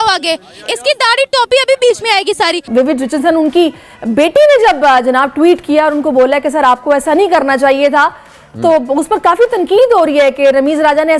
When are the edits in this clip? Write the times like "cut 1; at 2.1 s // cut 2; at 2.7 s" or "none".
cut 1; at 2.7 s